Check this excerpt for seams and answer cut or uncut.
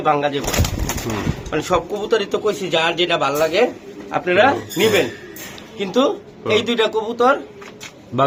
uncut